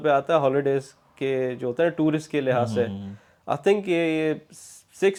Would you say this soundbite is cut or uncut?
uncut